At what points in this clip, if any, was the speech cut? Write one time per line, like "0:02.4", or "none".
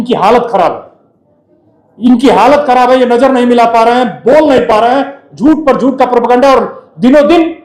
none